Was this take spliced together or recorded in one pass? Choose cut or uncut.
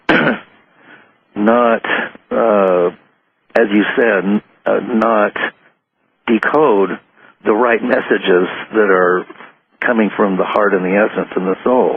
cut